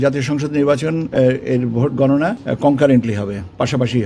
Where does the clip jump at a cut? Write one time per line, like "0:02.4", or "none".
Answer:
0:02.4